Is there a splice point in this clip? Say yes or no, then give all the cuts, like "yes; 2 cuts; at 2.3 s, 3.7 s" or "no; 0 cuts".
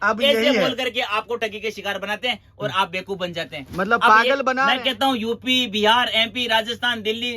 yes; 1 cut; at 4.7 s